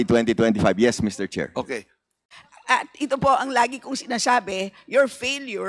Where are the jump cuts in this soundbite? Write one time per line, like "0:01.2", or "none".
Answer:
0:02.2